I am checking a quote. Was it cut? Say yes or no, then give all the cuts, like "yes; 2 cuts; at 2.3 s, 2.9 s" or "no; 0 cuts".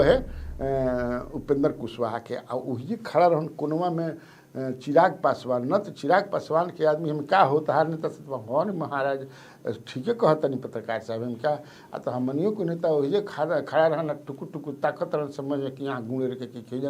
no; 0 cuts